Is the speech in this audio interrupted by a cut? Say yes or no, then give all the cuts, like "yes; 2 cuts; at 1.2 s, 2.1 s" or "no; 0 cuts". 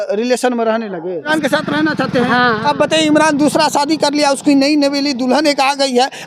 yes; 1 cut; at 1.3 s